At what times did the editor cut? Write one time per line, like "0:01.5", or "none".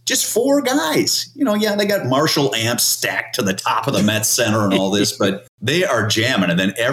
0:05.5